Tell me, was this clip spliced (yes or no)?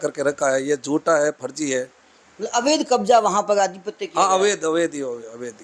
no